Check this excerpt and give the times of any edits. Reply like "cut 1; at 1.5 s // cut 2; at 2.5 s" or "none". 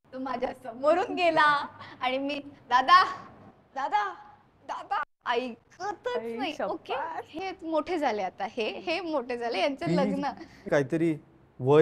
cut 1; at 7.3 s // cut 2; at 10.6 s